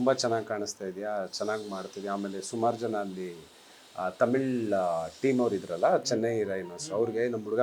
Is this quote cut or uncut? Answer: uncut